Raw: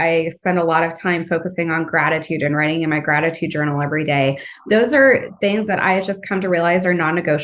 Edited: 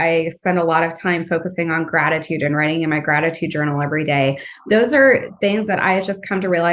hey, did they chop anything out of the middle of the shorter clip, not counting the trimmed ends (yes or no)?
no